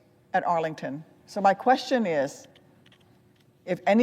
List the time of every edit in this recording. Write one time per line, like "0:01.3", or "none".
0:01.1